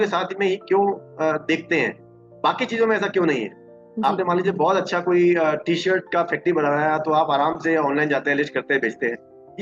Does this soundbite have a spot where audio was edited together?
no; 0 cuts

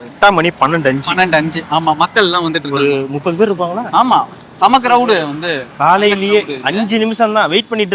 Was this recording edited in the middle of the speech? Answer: no; 0 cuts

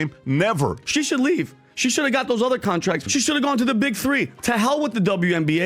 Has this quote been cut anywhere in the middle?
yes; 2 cuts; at 0.8 s, 3.0 s

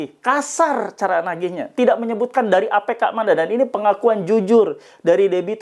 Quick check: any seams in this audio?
no; 0 cuts

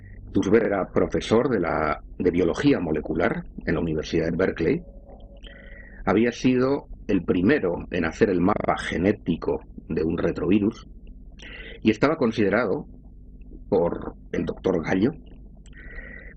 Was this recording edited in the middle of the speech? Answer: yes; 1 cut; at 15.0 s

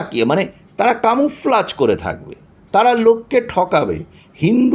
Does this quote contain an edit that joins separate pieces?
no; 0 cuts

